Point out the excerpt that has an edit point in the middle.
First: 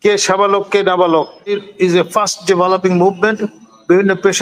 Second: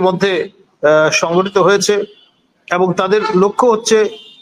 first; 1 cut; at 1.5 s

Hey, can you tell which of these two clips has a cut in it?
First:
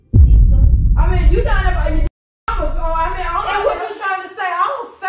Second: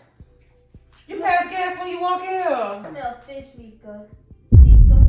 second; 1 cut; at 2.9 s

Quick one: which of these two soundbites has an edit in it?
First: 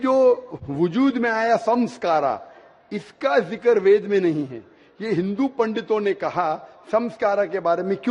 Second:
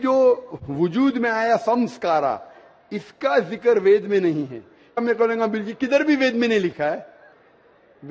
first; 1 cut; at 5.0 s

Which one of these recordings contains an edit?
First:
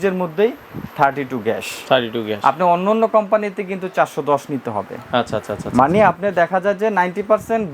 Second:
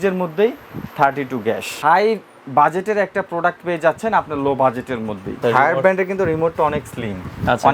second; 2 cuts; at 1.7 s, 5.4 s

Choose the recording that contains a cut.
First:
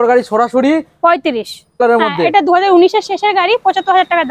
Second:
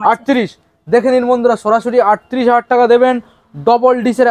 first; 1 cut; at 1.8 s

